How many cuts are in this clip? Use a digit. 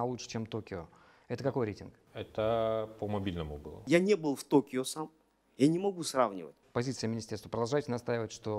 2